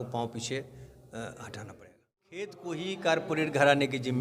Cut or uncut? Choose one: cut